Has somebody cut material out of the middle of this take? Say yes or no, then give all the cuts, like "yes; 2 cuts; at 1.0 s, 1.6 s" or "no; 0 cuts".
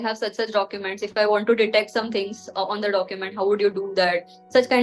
no; 0 cuts